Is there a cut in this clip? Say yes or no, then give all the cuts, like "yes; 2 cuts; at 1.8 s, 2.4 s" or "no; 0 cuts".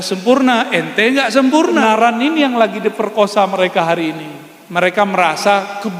yes; 1 cut; at 1.8 s